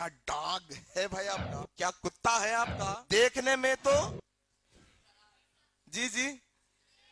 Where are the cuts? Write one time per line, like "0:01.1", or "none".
0:01.6
0:02.8
0:04.1